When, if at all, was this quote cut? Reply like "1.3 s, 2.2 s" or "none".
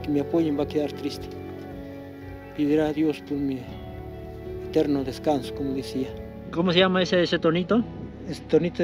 6.4 s